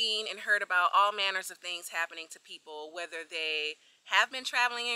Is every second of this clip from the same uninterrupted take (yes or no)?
yes